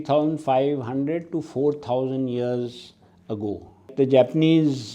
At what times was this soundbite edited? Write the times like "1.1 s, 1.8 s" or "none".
3.9 s

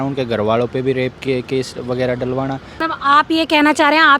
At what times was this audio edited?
2.8 s

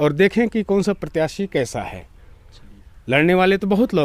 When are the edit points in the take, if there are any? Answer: none

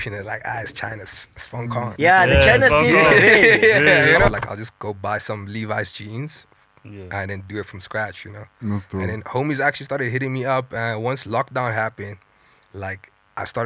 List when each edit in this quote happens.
4.3 s

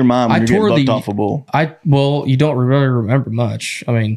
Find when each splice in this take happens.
none

